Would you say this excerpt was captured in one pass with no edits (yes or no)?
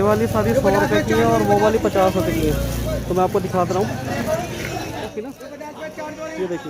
no